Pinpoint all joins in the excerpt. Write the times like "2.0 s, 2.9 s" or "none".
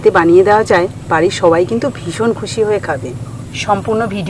none